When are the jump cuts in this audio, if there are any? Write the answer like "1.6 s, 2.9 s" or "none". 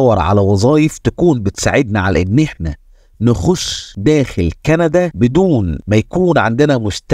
none

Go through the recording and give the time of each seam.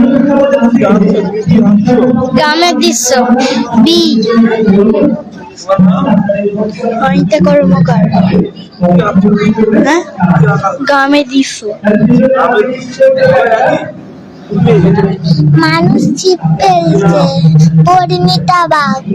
none

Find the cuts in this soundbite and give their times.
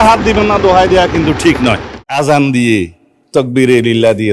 1.9 s

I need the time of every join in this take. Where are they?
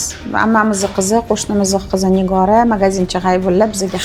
none

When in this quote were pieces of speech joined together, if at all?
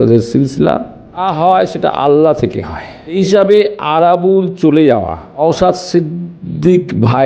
1.2 s, 3.1 s, 5.4 s

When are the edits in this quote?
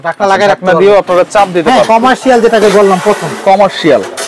1.9 s

